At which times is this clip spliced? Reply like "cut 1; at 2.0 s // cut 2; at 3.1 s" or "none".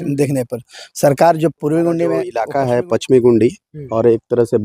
cut 1; at 2.4 s